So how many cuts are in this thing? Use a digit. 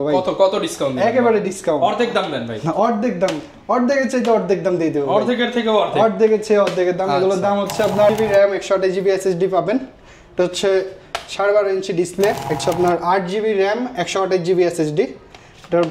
2